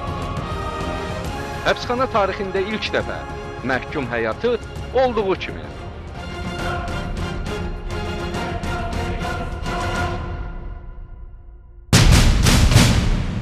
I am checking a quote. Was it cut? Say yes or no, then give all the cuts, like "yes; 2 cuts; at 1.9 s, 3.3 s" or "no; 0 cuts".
yes; 1 cut; at 11.9 s